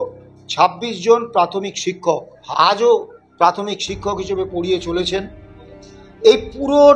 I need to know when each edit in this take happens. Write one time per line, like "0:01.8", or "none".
0:02.3